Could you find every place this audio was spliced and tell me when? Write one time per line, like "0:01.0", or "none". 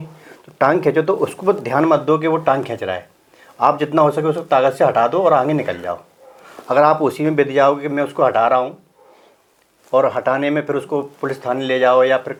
none